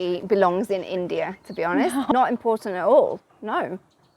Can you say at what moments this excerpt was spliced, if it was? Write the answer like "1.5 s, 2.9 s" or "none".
2.1 s